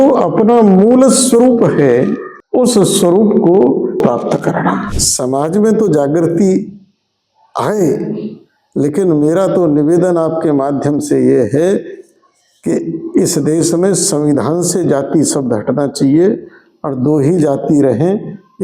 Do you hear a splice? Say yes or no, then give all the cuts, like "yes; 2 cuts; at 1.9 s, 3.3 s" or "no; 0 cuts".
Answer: yes; 1 cut; at 5.0 s